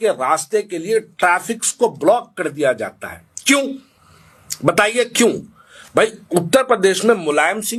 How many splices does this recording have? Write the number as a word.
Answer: zero